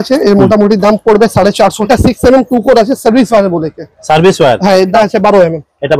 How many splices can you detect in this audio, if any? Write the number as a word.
two